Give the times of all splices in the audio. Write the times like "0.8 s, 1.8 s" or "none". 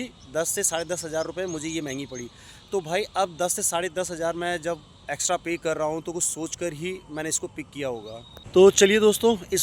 none